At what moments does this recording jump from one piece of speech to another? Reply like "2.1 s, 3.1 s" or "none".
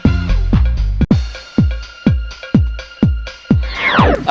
1.1 s